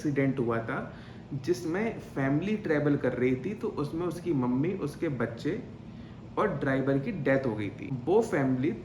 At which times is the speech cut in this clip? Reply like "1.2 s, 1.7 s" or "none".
7.9 s